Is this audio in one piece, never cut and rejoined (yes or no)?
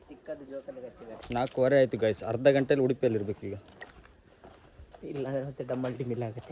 no